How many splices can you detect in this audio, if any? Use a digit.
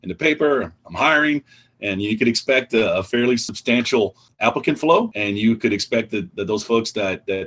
2